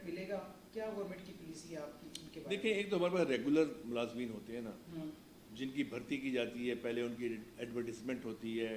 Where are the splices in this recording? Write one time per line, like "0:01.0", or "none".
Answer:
none